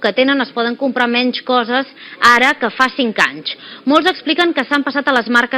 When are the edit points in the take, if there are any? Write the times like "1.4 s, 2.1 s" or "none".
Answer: none